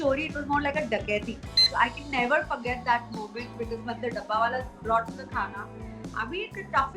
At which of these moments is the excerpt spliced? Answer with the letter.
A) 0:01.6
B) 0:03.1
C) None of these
A